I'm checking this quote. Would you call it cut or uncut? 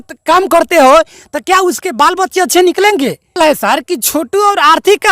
cut